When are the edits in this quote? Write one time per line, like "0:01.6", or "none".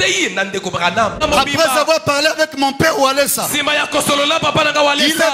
0:01.2